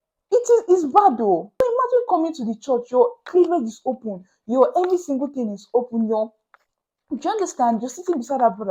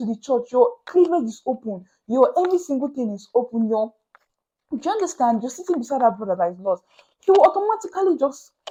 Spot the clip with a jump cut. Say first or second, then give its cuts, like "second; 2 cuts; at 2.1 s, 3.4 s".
first; 1 cut; at 1.5 s